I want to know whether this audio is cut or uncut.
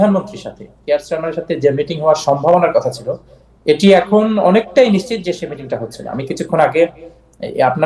cut